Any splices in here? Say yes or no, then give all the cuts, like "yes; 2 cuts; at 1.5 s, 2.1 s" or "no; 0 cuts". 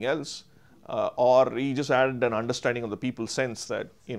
no; 0 cuts